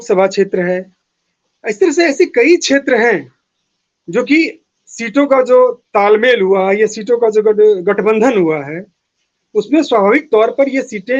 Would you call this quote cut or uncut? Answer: uncut